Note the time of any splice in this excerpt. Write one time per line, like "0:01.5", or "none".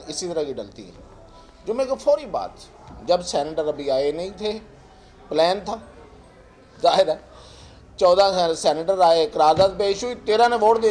none